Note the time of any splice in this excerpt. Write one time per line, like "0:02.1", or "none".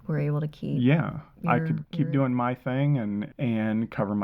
0:01.8
0:03.3